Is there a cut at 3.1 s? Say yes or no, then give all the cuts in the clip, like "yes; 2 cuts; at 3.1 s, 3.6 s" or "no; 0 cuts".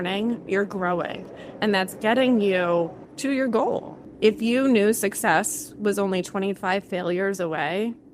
yes; 2 cuts; at 3.1 s, 4.0 s